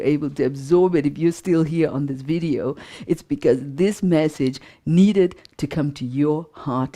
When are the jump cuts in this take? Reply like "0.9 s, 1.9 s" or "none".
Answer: none